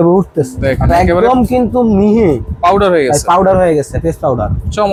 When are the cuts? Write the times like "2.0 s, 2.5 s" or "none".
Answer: none